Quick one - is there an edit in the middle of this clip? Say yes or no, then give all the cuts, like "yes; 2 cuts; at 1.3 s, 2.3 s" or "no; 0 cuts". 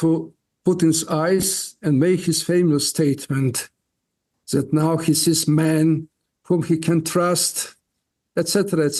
no; 0 cuts